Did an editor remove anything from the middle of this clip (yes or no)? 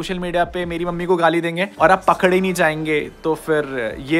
yes